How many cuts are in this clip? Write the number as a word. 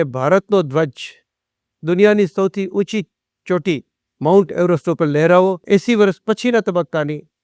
one